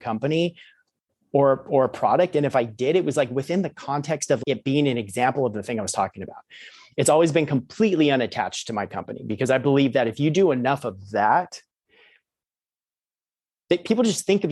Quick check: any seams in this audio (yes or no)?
yes